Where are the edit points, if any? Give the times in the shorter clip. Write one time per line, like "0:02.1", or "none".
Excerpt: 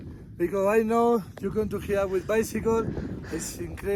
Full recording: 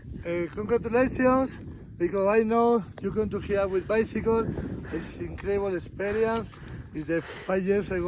none